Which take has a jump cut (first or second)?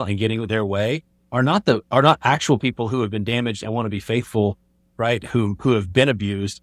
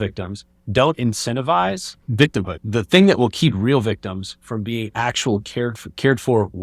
second